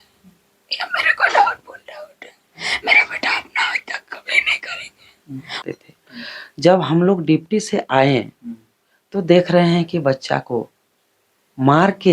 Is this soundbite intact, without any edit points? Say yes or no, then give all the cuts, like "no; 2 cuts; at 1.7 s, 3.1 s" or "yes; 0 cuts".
no; 1 cut; at 5.6 s